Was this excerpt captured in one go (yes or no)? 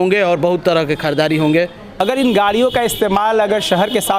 no